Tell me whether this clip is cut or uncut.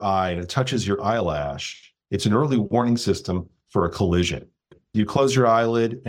cut